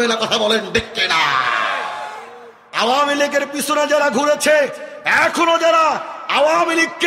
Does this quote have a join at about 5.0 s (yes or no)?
no